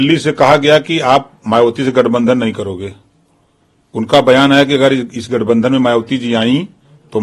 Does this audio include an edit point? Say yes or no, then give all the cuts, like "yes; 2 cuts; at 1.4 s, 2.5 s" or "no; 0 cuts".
no; 0 cuts